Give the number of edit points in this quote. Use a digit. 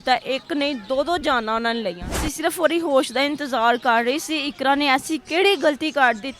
1